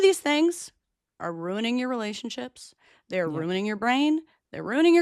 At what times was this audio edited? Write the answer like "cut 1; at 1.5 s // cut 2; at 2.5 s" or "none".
none